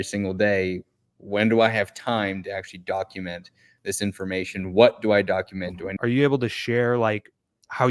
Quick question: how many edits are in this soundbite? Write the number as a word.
one